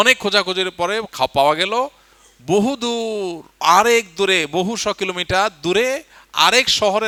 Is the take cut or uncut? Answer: uncut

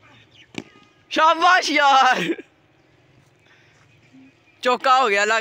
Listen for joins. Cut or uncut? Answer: uncut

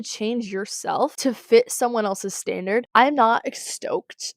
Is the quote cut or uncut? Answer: cut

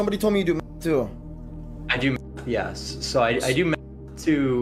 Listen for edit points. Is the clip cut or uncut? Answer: uncut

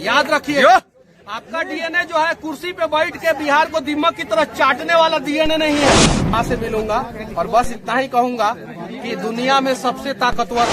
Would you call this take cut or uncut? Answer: cut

